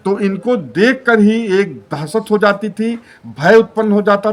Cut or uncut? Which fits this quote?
uncut